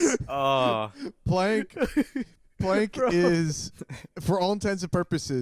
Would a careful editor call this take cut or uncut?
uncut